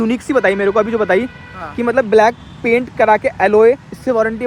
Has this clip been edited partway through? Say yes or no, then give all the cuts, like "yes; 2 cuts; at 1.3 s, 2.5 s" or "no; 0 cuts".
no; 0 cuts